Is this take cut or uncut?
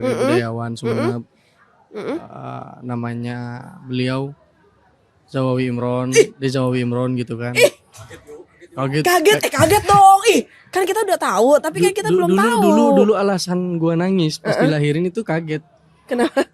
uncut